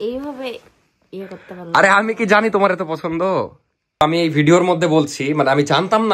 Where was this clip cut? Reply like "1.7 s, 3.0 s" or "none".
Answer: none